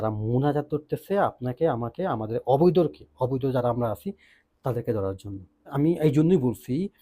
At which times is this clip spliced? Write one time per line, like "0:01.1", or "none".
0:05.7